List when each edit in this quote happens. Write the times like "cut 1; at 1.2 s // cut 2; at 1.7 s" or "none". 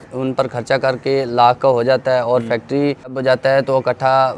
cut 1; at 3.2 s